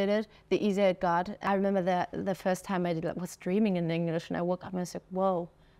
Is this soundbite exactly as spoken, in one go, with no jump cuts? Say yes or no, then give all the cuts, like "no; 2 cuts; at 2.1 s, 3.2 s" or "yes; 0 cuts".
no; 1 cut; at 1.4 s